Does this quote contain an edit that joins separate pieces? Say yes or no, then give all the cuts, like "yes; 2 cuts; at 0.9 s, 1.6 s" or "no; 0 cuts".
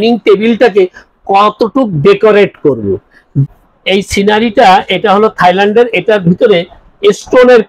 yes; 1 cut; at 3.2 s